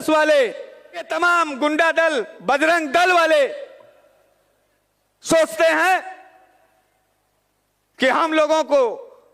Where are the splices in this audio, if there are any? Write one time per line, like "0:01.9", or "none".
0:01.1